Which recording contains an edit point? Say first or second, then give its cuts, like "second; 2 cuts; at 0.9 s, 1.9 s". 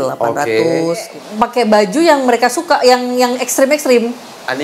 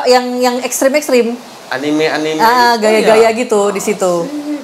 first; 1 cut; at 1.1 s